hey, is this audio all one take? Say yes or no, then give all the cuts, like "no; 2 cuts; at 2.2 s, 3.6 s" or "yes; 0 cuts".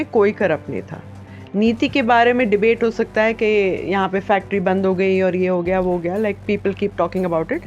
yes; 0 cuts